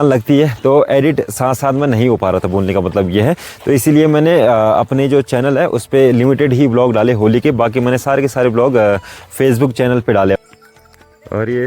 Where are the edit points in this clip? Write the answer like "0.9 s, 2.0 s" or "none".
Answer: 10.4 s